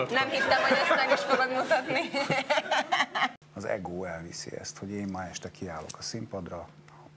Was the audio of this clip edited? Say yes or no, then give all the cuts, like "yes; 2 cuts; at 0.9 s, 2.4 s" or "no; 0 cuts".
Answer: yes; 1 cut; at 3.4 s